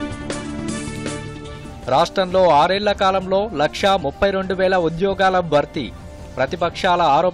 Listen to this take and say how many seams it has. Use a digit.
1